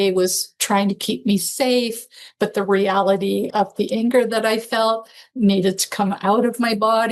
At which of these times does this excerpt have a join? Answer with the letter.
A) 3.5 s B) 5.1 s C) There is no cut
A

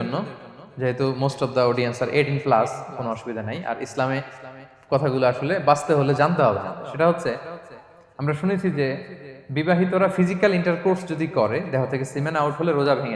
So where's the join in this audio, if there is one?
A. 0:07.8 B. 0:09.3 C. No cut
C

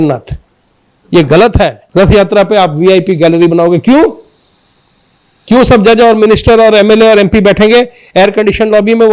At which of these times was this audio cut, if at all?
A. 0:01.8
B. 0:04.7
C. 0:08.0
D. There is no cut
A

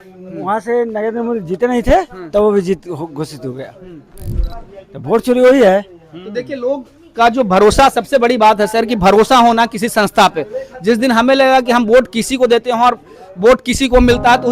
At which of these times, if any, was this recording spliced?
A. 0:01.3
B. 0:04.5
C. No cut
B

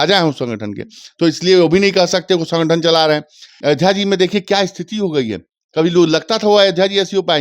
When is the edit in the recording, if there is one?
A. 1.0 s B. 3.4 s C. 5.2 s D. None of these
B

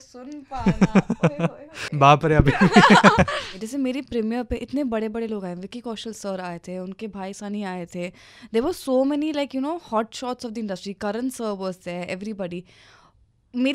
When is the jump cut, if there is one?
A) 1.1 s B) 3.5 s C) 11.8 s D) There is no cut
B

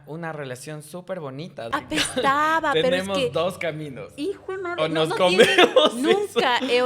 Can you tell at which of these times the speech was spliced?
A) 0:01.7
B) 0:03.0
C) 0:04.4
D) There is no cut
A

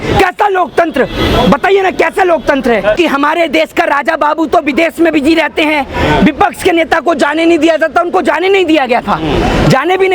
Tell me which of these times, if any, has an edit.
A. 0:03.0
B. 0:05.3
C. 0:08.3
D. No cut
A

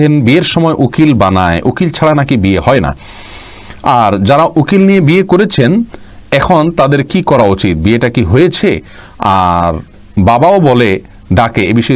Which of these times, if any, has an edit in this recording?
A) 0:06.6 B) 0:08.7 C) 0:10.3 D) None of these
D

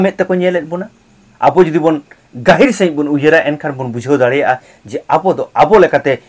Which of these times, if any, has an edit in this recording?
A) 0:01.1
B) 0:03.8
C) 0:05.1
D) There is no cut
A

